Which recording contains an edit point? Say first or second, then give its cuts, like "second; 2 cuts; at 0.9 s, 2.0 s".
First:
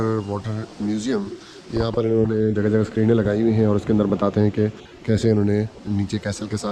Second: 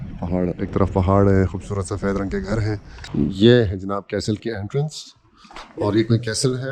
second; 1 cut; at 2.9 s